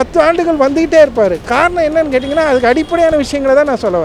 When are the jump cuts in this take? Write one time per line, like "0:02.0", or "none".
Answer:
none